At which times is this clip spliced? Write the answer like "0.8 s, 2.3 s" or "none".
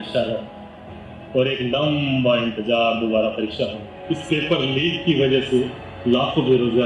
3.9 s